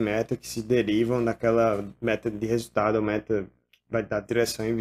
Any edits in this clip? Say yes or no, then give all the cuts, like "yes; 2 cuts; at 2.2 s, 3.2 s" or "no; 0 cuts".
no; 0 cuts